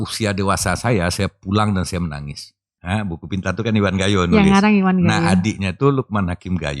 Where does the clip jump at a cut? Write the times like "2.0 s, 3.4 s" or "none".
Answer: 2.7 s